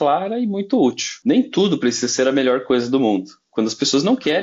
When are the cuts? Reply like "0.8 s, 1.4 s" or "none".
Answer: 1.1 s